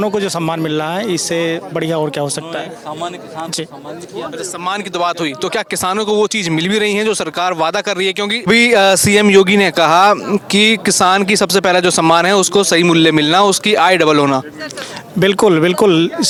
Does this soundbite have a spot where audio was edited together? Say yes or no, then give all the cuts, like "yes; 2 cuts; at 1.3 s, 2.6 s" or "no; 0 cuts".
no; 0 cuts